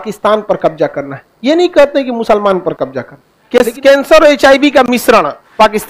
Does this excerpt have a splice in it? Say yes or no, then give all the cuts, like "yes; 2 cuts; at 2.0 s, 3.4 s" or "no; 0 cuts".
yes; 1 cut; at 3.5 s